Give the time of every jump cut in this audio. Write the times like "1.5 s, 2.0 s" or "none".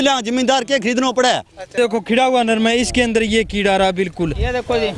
1.8 s

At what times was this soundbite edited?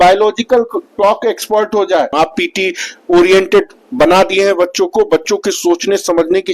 2.1 s

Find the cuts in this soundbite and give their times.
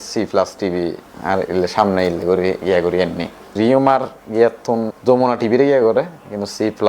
3.5 s, 4.9 s

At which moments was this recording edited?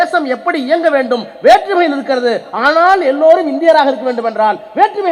none

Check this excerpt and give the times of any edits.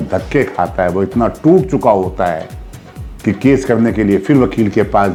none

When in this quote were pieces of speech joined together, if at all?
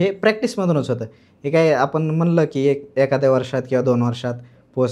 none

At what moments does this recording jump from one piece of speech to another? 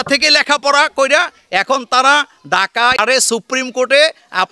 3.0 s

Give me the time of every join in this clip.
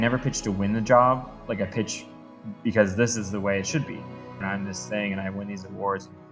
4.4 s

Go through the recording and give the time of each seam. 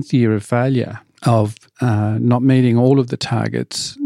1.0 s

